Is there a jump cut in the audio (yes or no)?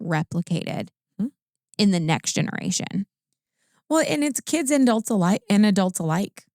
no